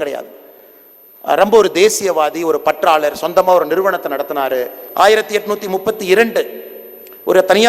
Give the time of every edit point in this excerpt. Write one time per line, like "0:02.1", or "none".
0:04.8